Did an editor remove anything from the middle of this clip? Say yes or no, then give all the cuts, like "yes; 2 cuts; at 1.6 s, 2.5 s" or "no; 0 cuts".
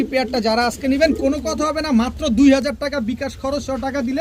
no; 0 cuts